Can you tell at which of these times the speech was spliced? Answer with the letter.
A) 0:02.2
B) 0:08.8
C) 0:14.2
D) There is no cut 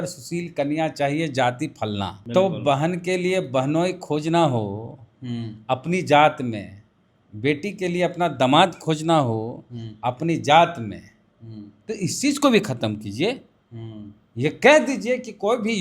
A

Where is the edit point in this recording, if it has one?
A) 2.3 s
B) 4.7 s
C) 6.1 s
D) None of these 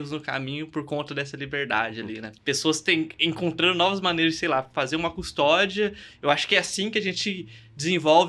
A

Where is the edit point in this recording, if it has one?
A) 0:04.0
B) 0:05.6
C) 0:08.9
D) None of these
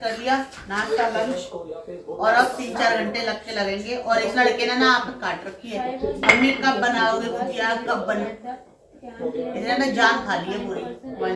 D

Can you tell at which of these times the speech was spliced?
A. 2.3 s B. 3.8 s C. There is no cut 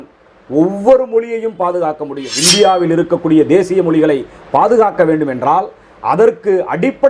A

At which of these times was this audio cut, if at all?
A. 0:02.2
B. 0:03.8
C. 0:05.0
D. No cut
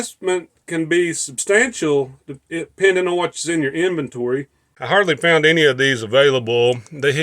C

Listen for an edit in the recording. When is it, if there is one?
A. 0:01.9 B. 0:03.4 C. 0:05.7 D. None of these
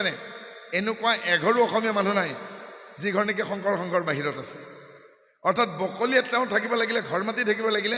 D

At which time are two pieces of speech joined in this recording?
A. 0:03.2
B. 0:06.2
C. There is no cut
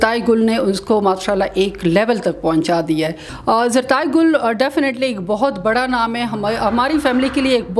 A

